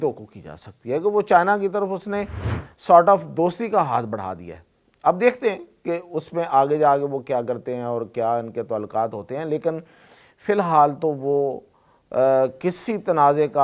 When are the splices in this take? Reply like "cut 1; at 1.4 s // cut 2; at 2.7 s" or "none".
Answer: none